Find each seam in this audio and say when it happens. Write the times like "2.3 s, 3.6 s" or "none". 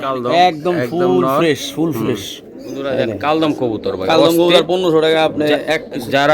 2.8 s